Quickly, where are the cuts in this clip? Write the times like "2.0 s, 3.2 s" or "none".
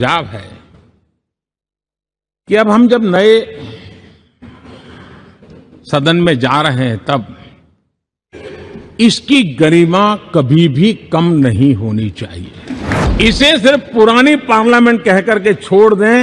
13.0 s

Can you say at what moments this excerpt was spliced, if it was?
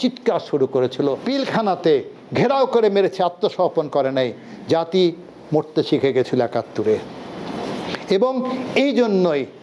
1.2 s

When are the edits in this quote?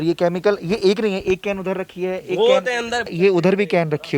3.1 s

